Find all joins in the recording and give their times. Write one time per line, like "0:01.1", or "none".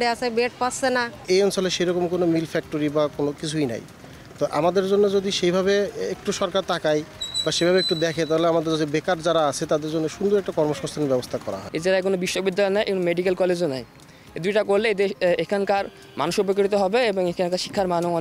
0:01.1
0:11.7